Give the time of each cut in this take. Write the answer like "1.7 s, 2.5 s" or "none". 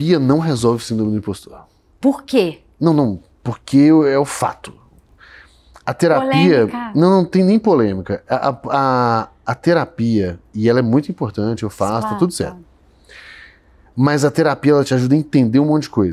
none